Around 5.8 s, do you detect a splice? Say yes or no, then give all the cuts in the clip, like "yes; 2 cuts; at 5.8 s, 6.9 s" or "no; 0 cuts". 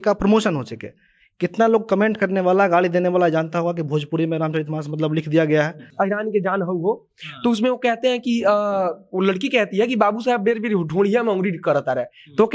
yes; 1 cut; at 5.8 s